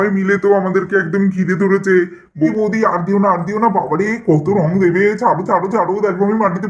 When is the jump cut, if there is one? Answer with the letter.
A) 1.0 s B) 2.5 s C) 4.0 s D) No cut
B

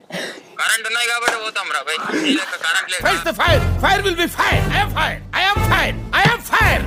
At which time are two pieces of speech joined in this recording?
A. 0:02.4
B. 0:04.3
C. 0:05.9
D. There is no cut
D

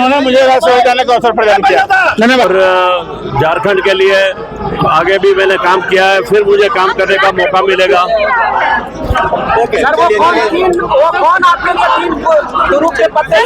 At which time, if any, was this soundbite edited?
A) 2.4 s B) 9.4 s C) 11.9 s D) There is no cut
A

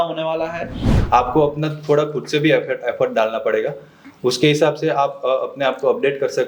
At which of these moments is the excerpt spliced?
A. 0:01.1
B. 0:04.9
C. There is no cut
A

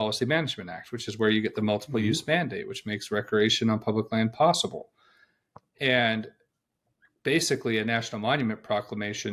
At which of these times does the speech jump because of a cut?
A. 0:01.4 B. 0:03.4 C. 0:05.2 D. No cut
D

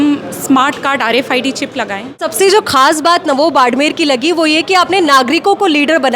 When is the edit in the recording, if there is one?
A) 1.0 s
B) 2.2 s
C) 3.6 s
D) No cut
B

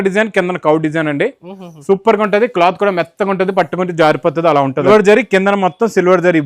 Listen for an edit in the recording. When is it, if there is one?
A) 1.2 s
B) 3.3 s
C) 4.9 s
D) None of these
C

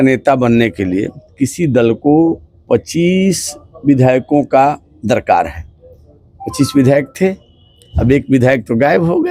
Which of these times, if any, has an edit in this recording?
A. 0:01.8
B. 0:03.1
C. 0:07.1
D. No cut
D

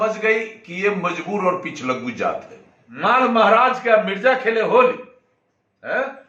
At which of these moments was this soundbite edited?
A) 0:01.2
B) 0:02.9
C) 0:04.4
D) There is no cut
B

